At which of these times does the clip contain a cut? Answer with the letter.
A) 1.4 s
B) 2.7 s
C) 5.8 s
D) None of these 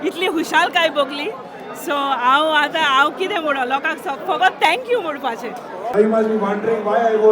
C